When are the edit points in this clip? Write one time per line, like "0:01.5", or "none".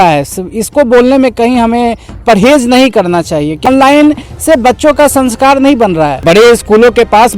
0:03.7
0:06.2